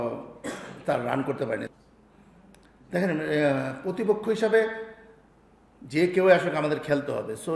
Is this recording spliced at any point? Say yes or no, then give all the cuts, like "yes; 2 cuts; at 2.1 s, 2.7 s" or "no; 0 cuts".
yes; 1 cut; at 1.7 s